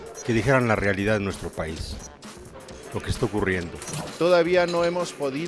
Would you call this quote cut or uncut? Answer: cut